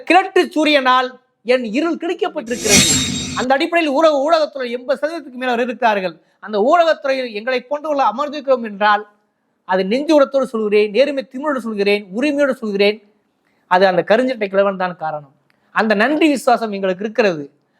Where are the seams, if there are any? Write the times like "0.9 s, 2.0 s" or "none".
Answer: 2.9 s